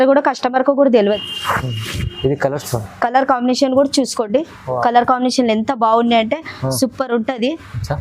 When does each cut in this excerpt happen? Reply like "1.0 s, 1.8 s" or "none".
1.3 s

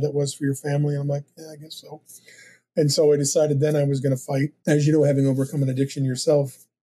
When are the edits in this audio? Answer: 4.5 s

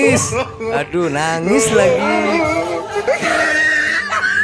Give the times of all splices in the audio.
none

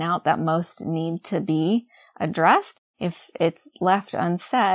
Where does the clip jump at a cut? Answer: 2.7 s

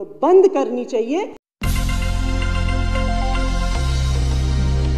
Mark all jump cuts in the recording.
1.4 s

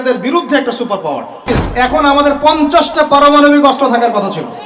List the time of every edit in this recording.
1.6 s

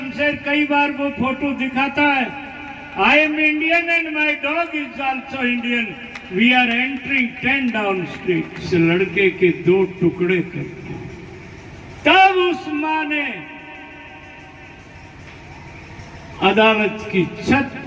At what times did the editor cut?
8.6 s

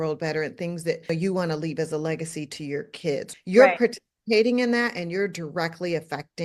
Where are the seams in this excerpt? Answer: 3.3 s

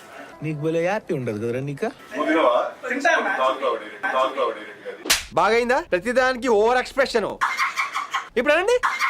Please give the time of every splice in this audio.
2.0 s, 3.9 s

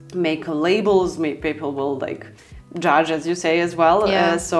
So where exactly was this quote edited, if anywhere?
none

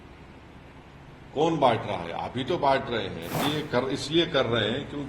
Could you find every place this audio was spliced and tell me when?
3.4 s

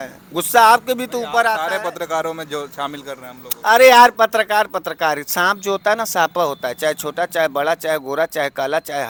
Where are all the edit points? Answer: none

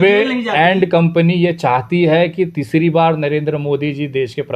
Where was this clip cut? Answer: none

